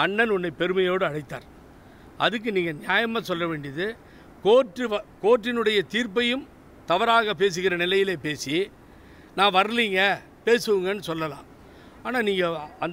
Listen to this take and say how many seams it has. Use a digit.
0